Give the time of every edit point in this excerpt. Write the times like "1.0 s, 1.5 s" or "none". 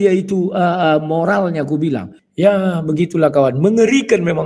2.1 s